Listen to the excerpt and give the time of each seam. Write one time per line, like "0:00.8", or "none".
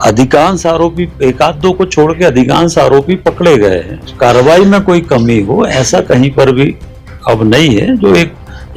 0:04.1